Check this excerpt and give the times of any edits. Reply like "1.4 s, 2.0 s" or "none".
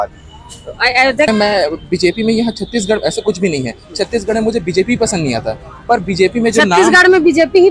1.3 s